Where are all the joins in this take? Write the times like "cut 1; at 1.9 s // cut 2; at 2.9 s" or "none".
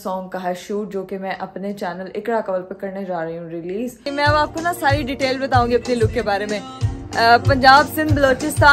cut 1; at 4.0 s

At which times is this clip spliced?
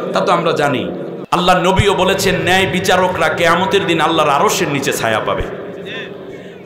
cut 1; at 1.1 s

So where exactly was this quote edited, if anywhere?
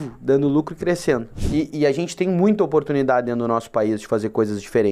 cut 1; at 1.3 s

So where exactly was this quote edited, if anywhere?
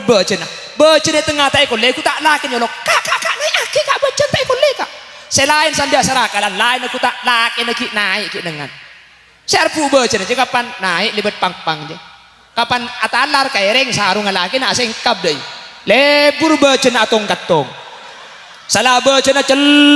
none

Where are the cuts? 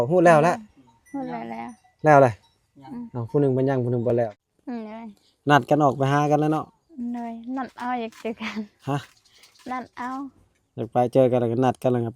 cut 1; at 4.4 s

